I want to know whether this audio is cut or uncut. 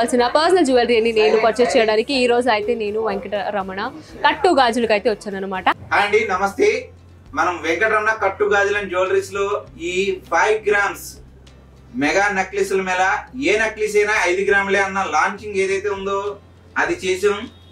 uncut